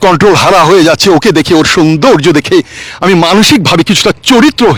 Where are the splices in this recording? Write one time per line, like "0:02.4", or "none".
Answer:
none